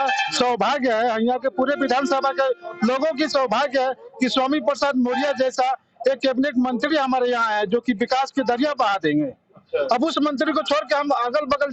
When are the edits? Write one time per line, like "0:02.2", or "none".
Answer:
none